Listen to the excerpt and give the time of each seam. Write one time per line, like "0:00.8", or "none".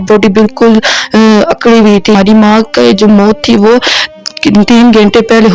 0:02.1